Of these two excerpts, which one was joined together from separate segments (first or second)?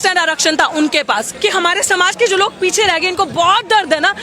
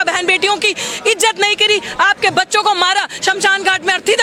first